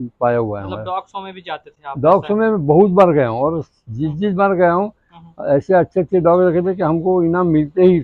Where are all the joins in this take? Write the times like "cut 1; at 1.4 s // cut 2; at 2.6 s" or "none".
none